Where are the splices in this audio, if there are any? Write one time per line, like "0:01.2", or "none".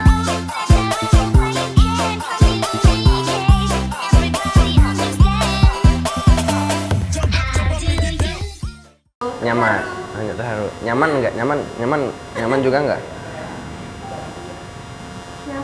0:09.2